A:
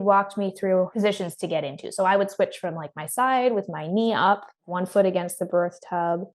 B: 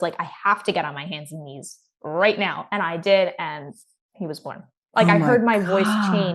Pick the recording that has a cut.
A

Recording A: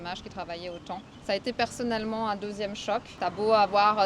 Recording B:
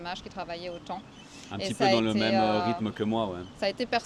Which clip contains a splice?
A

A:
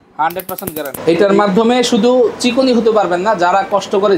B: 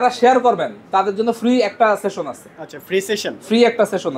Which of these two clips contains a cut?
A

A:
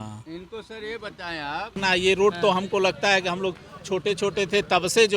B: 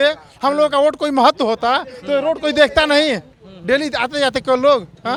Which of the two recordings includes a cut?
A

